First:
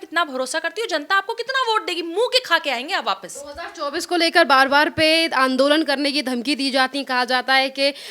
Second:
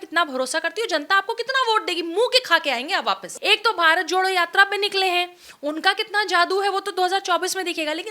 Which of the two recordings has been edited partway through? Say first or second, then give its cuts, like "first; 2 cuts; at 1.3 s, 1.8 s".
second; 1 cut; at 3.3 s